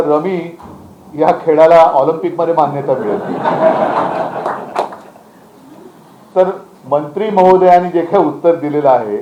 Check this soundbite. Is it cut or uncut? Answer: uncut